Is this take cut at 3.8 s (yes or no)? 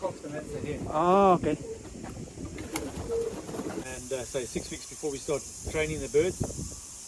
yes